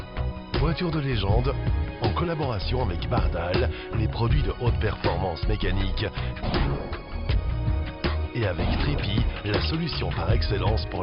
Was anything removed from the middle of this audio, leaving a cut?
no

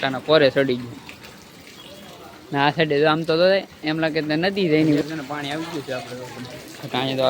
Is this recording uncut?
no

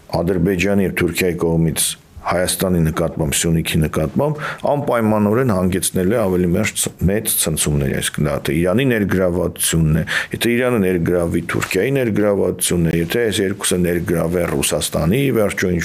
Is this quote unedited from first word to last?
yes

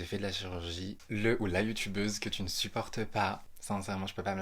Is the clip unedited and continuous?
no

